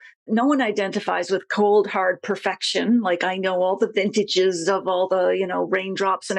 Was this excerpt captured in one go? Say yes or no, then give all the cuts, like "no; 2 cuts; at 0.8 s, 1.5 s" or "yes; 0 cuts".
yes; 0 cuts